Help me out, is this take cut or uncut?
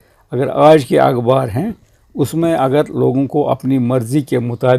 uncut